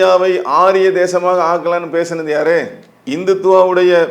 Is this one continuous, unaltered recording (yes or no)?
yes